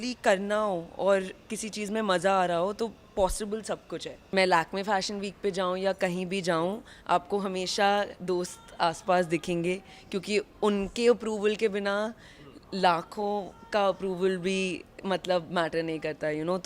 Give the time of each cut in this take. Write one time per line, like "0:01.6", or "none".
0:04.2